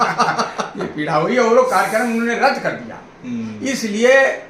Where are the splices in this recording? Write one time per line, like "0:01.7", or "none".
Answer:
none